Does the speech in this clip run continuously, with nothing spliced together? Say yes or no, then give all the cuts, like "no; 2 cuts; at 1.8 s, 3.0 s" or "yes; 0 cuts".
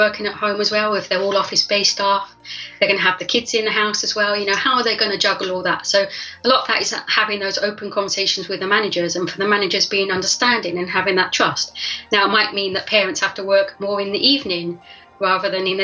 yes; 0 cuts